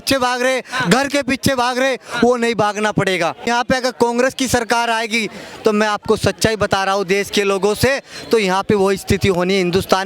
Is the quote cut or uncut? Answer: cut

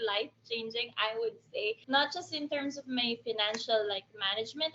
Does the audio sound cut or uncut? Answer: cut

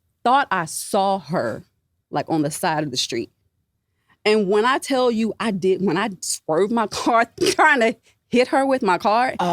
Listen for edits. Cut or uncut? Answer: uncut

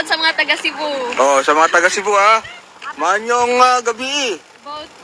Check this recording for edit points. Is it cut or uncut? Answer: uncut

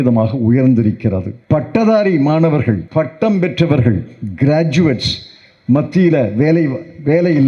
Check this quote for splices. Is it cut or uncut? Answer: cut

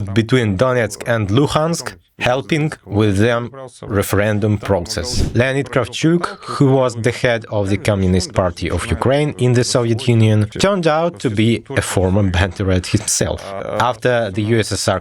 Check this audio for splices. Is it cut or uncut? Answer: cut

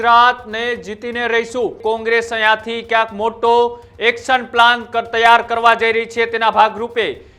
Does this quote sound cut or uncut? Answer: cut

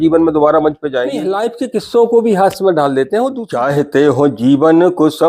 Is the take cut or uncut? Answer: cut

